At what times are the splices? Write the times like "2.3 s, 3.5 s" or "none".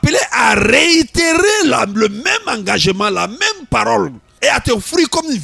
4.2 s